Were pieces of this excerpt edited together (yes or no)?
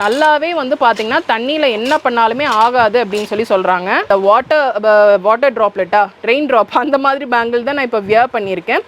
yes